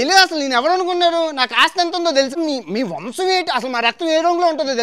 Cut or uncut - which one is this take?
cut